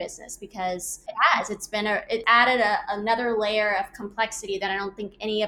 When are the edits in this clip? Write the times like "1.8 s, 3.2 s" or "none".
1.0 s, 2.2 s